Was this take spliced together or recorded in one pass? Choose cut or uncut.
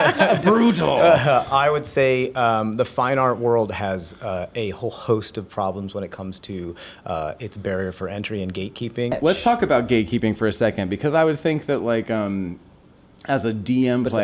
cut